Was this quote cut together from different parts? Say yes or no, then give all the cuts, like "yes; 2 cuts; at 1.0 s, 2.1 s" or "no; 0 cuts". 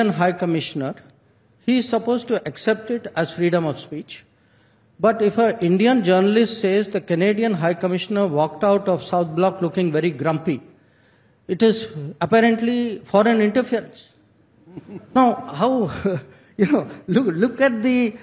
no; 0 cuts